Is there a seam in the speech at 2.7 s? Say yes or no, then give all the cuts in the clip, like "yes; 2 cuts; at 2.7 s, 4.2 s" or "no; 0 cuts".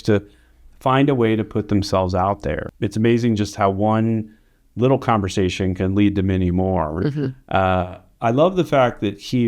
yes; 1 cut; at 2.7 s